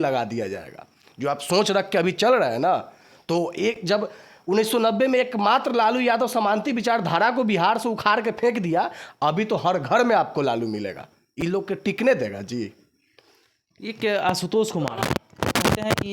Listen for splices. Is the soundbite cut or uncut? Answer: uncut